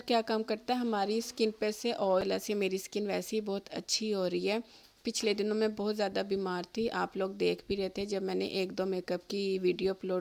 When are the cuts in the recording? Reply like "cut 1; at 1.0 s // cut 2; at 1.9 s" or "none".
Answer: cut 1; at 2.2 s